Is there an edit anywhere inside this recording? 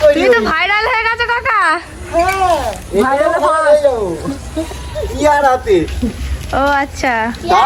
no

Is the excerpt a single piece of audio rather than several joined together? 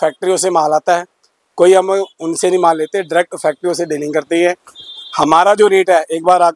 yes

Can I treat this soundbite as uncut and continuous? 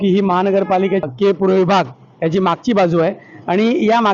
no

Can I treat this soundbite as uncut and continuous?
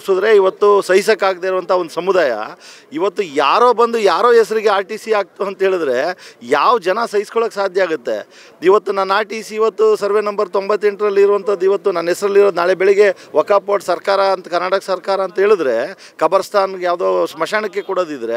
yes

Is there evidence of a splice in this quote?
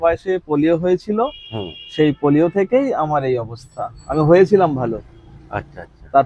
no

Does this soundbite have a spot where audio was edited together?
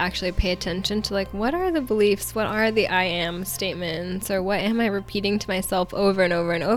no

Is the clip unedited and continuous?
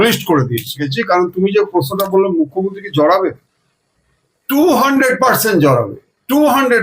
no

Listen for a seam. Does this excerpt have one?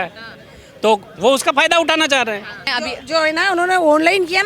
yes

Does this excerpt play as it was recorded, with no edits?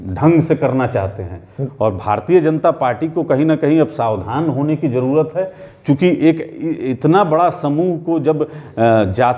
yes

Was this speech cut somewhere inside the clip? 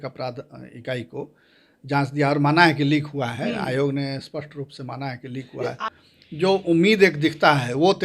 yes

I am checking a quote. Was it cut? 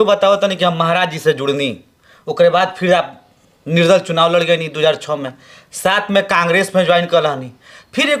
no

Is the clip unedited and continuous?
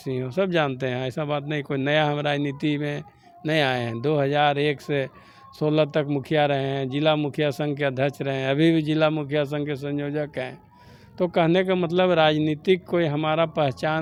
yes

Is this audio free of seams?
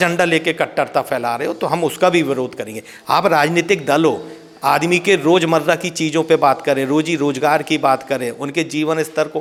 yes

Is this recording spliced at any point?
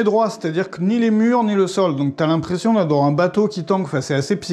no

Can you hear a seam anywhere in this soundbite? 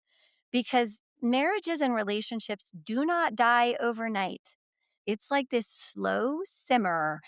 yes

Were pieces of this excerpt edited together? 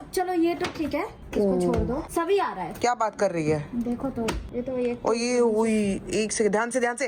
no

